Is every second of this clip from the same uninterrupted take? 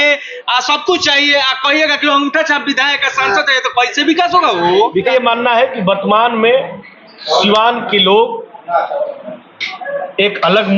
no; 1 cut; at 5.1 s

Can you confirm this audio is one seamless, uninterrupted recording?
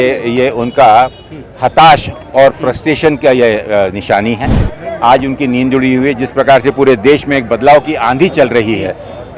yes; 0 cuts

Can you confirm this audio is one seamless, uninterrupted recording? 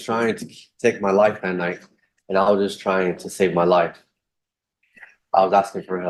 yes; 0 cuts

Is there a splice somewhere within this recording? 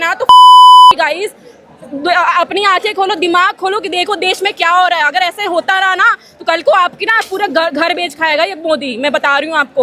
no; 0 cuts

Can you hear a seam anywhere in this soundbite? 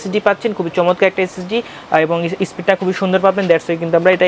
no; 0 cuts

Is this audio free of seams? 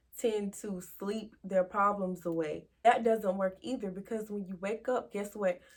yes; 0 cuts

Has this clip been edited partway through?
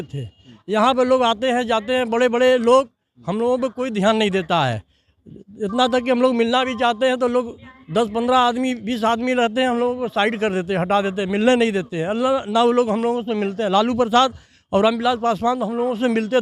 no; 0 cuts

